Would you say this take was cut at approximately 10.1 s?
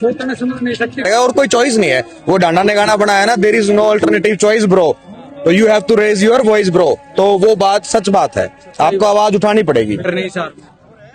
yes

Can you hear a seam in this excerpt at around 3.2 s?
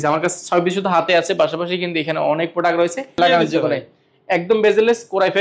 yes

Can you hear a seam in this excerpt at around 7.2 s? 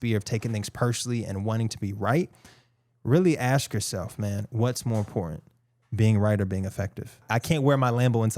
yes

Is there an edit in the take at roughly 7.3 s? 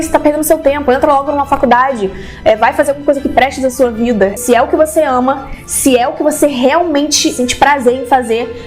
yes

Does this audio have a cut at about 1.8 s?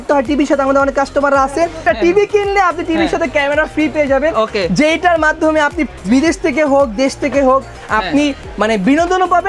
yes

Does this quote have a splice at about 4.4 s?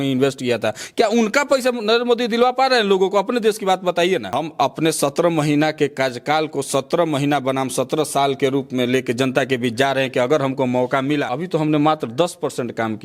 yes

